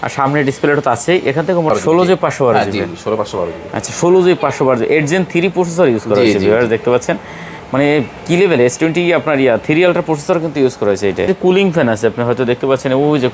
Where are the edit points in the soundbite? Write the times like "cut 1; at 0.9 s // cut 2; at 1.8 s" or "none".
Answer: cut 1; at 1.7 s // cut 2; at 11.3 s